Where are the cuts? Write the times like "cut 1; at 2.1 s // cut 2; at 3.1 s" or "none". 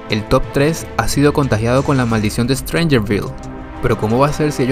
none